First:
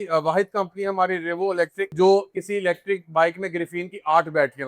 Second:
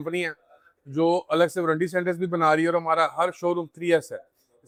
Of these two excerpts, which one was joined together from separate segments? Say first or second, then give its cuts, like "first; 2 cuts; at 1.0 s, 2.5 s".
first; 1 cut; at 1.9 s